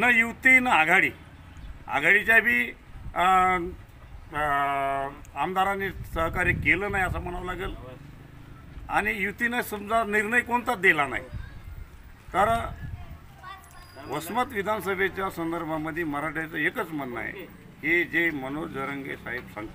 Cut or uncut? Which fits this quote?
uncut